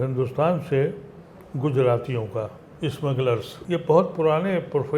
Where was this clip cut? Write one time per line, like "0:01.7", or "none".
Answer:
0:03.5